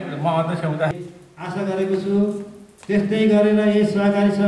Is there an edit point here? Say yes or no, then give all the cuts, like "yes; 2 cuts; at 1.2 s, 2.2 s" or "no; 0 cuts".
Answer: yes; 1 cut; at 0.9 s